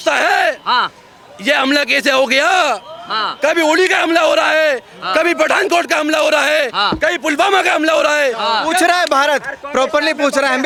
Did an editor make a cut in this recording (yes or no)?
no